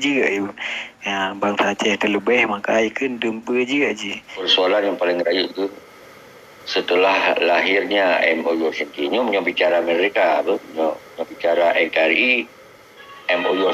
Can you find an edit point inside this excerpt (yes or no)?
yes